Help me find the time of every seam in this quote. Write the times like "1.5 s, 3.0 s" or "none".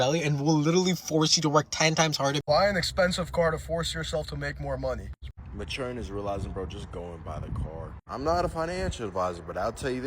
2.4 s, 5.3 s

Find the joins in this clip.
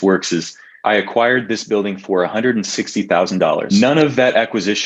3.6 s

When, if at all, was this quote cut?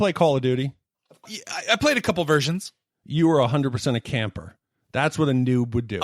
1.4 s

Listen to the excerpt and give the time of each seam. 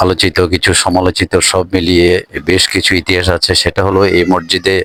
none

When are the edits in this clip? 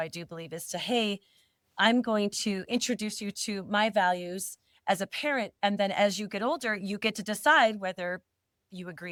none

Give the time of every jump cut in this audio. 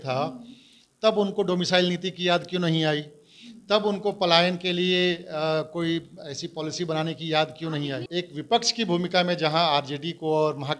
8.0 s

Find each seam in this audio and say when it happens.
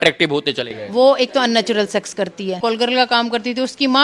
2.6 s

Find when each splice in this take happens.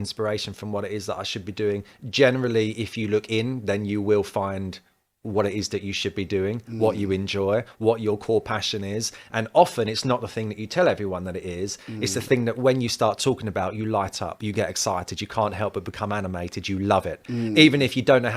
none

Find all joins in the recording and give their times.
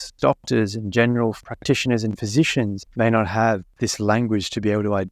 1.4 s, 2.8 s, 3.8 s

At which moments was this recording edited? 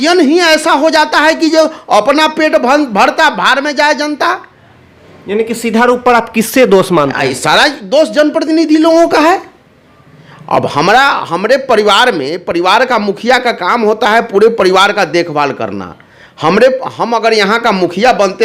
none

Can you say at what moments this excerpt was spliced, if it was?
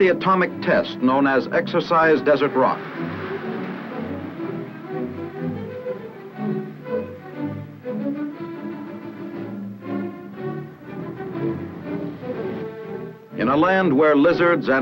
13.4 s

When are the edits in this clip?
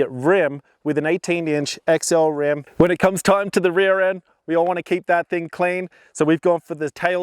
2.7 s

